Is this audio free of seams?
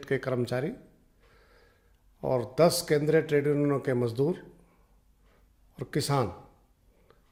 yes; 0 cuts

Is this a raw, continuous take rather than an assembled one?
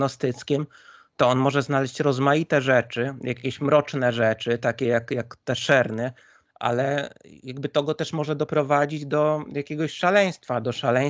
no; 1 cut; at 6.4 s

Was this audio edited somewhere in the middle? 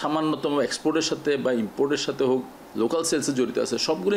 yes; 1 cut; at 2.6 s

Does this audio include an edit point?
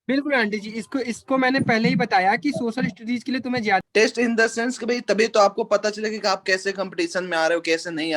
yes; 1 cut; at 3.8 s

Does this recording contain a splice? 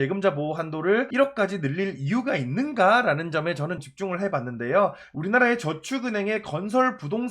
yes; 3 cuts; at 1.1 s, 3.8 s, 5.1 s

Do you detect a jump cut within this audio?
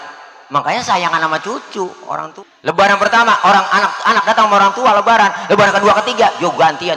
yes; 1 cut; at 2.3 s

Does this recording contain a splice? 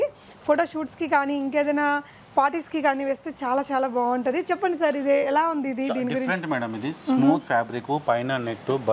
no; 0 cuts

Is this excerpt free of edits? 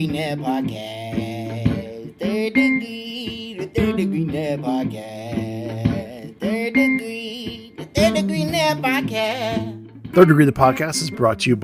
no; 1 cut; at 9.8 s

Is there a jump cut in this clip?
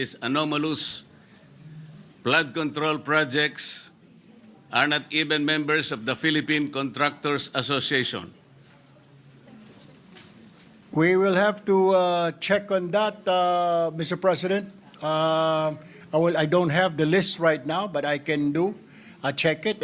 no; 0 cuts

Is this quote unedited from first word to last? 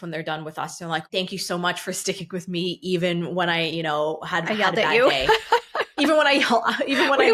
no; 1 cut; at 1.1 s

